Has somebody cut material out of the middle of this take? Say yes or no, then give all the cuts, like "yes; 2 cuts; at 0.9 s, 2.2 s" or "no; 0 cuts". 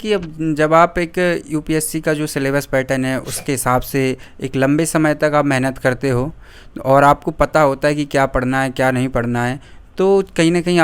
no; 0 cuts